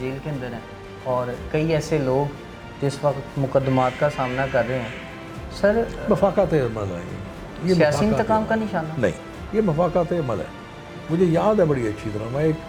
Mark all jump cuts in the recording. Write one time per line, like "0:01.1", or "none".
none